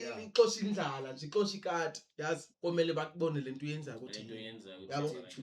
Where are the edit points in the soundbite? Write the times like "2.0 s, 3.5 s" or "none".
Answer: 2.5 s